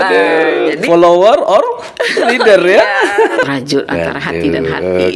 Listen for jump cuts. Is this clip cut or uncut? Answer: cut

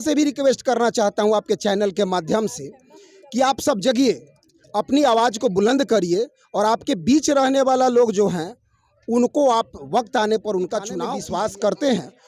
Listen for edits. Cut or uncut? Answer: cut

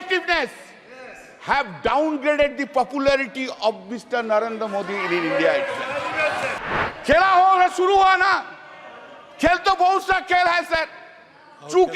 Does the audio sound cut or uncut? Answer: cut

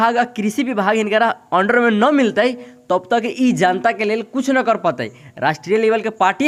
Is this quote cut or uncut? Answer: uncut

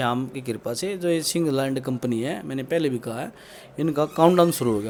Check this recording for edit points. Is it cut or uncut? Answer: uncut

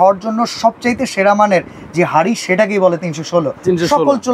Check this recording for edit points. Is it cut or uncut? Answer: uncut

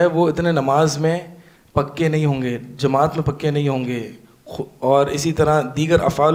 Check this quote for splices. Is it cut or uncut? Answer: uncut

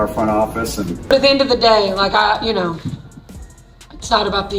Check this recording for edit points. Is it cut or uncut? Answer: cut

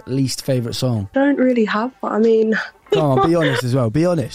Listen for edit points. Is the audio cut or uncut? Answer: cut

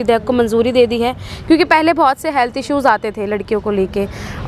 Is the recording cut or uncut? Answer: uncut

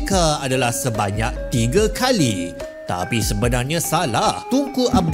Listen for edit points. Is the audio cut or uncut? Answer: uncut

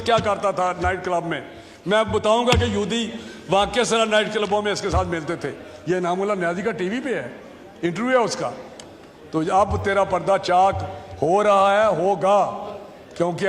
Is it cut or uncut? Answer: uncut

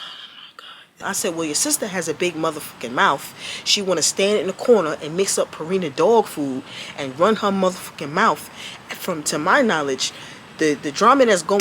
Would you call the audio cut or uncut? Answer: cut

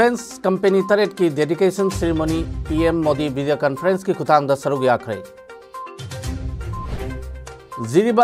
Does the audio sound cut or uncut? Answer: cut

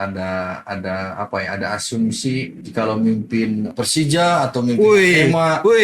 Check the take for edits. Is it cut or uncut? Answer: cut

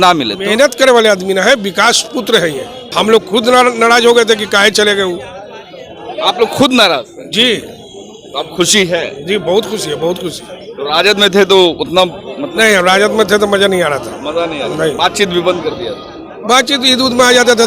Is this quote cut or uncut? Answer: cut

